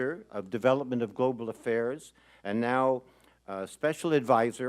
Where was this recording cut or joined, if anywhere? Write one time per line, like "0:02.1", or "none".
0:02.3